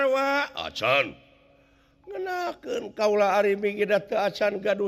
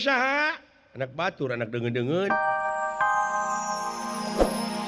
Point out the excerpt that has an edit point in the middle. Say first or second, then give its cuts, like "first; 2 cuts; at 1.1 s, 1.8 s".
second; 1 cut; at 2.4 s